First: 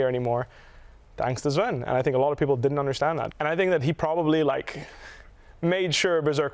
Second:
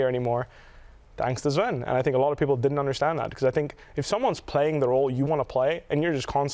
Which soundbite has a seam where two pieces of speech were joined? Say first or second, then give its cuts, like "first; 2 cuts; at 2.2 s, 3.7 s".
first; 1 cut; at 3.3 s